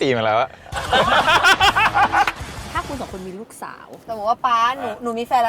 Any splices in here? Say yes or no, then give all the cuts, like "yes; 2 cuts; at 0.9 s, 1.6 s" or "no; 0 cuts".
yes; 2 cuts; at 2.7 s, 4.0 s